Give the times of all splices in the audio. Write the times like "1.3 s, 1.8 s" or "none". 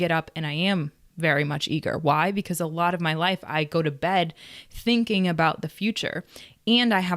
none